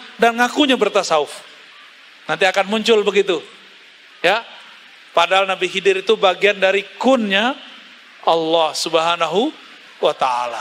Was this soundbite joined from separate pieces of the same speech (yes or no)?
no